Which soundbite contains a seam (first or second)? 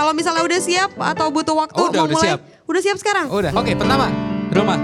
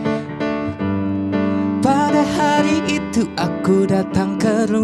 first